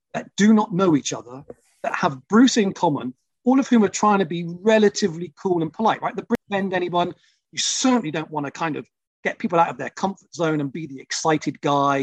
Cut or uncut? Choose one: cut